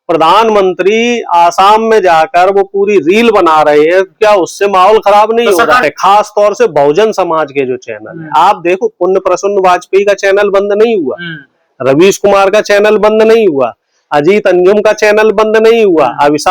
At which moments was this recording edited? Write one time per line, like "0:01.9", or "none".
0:05.8